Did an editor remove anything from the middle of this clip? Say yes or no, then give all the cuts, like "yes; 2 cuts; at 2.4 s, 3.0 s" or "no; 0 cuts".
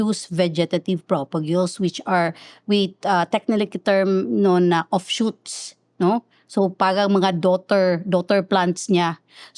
no; 0 cuts